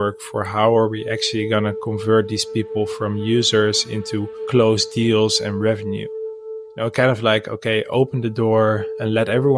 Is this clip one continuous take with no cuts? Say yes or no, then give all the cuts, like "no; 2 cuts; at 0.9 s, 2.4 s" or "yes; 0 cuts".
no; 1 cut; at 6.5 s